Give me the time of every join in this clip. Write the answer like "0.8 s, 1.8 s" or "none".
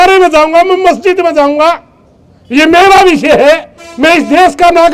none